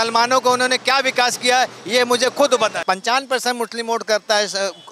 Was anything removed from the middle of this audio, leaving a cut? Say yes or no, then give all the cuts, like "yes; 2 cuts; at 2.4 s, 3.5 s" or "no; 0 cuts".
yes; 1 cut; at 2.8 s